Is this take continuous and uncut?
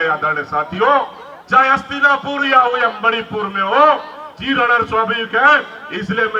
yes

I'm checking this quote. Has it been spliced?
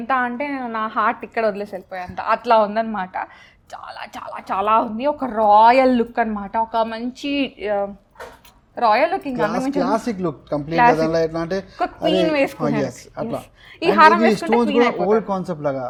no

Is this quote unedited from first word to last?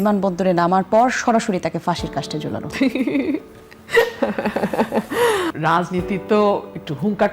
no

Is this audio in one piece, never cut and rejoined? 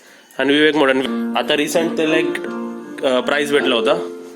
no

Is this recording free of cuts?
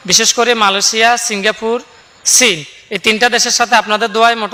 yes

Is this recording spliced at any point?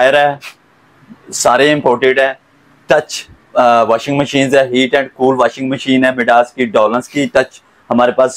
no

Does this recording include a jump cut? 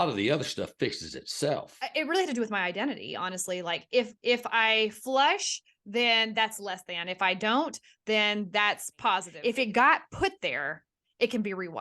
yes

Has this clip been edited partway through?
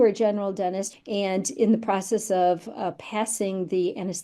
yes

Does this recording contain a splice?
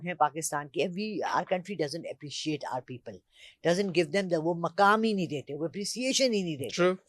no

